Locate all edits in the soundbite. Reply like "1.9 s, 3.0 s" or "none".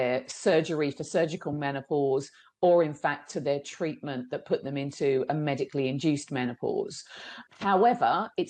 7.4 s